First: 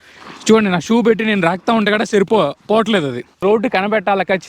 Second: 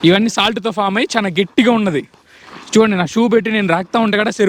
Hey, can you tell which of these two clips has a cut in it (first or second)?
first